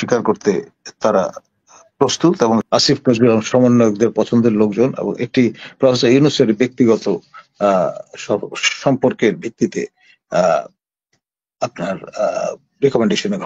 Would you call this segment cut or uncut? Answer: cut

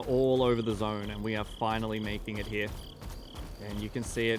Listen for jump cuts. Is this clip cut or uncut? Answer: cut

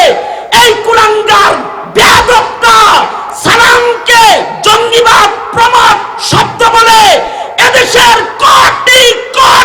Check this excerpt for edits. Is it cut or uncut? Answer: uncut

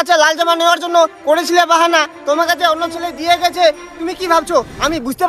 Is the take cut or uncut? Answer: uncut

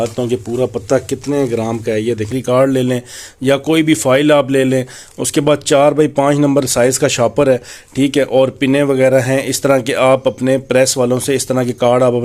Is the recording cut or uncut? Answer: cut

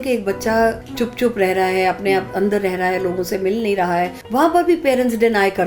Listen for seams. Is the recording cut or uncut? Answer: cut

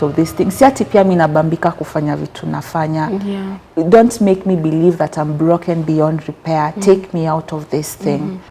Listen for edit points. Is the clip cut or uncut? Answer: uncut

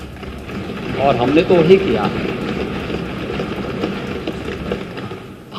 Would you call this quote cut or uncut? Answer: uncut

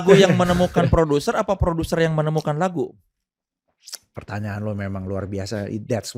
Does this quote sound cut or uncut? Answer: uncut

